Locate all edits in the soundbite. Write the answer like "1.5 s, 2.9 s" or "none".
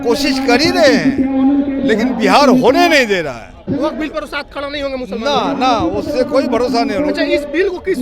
3.7 s

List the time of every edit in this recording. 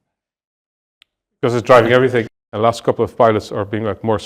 2.3 s

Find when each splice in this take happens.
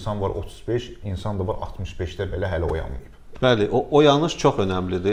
none

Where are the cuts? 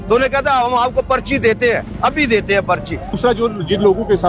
3.1 s

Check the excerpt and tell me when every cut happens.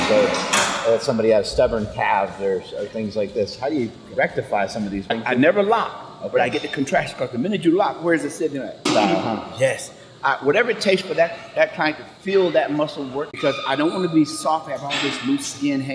5.2 s, 8.8 s, 13.3 s

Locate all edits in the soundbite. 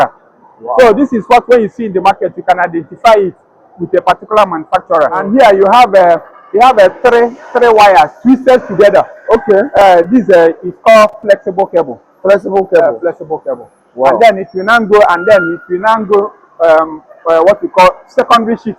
5.2 s

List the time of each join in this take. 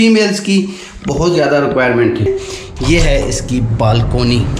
2.3 s

